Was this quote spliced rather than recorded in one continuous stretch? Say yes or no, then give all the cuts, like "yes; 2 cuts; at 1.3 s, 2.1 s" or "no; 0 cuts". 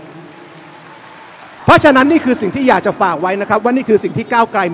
yes; 1 cut; at 1.5 s